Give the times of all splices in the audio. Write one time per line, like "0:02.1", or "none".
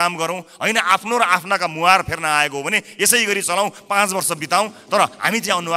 none